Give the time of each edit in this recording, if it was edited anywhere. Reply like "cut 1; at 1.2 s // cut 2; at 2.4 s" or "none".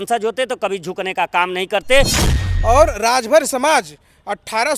cut 1; at 2.2 s